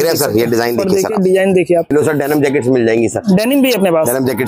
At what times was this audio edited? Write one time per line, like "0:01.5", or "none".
0:01.9